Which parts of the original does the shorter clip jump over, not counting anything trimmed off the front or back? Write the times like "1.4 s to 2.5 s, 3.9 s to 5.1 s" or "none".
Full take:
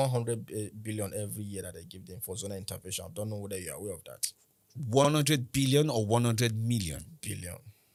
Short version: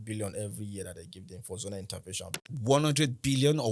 3.5 s to 5.0 s